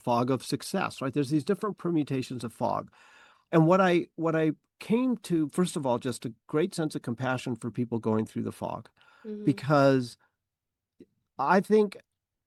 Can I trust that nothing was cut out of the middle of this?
yes; 0 cuts

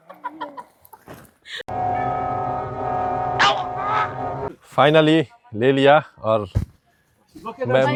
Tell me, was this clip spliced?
no; 0 cuts

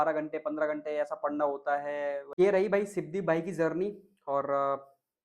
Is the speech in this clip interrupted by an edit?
yes; 1 cut; at 2.3 s

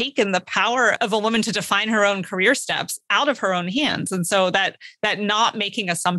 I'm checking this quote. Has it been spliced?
yes; 1 cut; at 1.0 s

